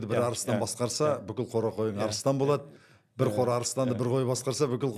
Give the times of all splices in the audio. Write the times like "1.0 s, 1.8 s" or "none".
none